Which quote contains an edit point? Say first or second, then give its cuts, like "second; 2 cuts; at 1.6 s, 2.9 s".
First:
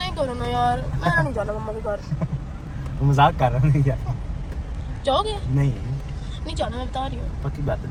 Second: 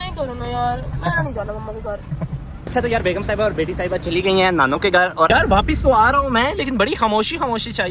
second; 2 cuts; at 2.7 s, 5.3 s